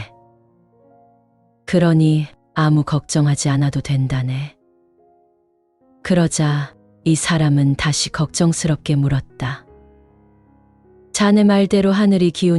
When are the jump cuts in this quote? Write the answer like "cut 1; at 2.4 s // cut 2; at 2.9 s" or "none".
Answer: cut 1; at 4.6 s // cut 2; at 5.9 s // cut 3; at 9.6 s // cut 4; at 11.1 s

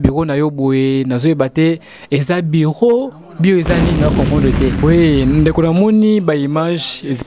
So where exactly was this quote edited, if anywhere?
cut 1; at 4.8 s

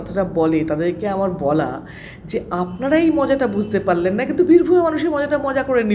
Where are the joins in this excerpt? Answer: none

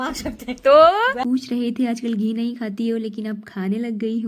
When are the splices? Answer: cut 1; at 1.2 s

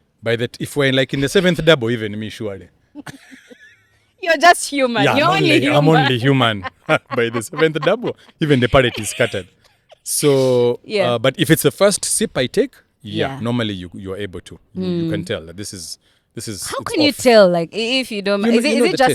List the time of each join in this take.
none

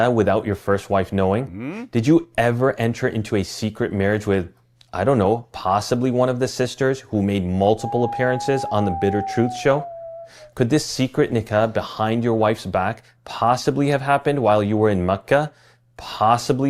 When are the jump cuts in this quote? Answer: cut 1; at 1.9 s // cut 2; at 9.0 s

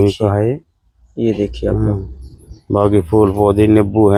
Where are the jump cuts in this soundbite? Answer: none

